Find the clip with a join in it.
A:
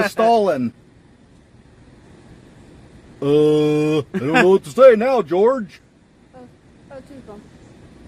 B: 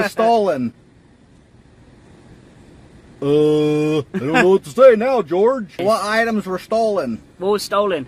B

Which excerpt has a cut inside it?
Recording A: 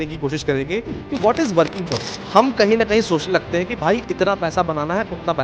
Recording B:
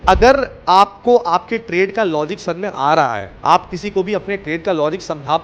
A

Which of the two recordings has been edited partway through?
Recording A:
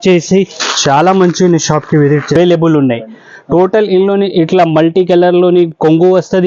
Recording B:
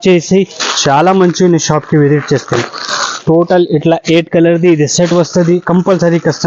A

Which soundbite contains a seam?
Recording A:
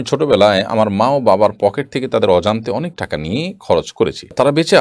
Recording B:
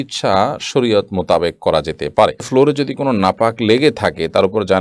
B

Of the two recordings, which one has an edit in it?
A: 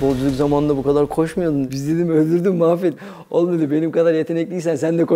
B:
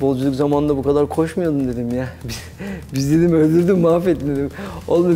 A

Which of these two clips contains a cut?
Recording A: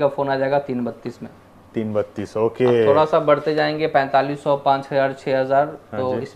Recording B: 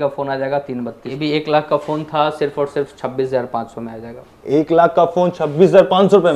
B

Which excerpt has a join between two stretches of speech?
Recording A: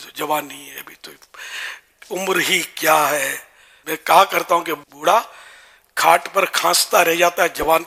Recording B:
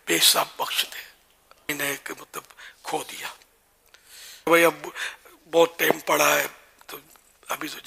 B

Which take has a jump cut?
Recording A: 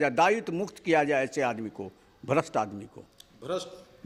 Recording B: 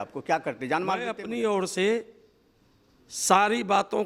B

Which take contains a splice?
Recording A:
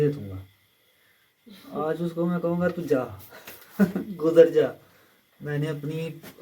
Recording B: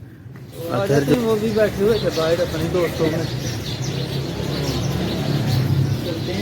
B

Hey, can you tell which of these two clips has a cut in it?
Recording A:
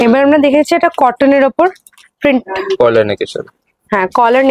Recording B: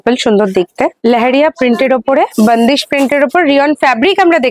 B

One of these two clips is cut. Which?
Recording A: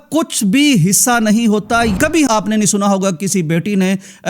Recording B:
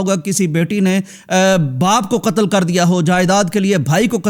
A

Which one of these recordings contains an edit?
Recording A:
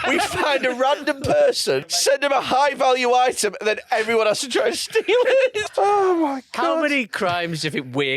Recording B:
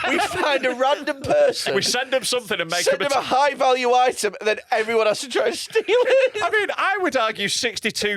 A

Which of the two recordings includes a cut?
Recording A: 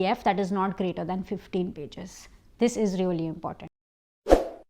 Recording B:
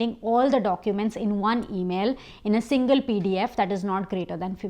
A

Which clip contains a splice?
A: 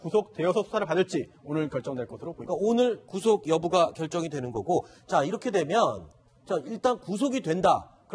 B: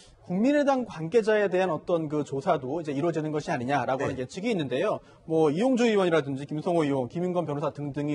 A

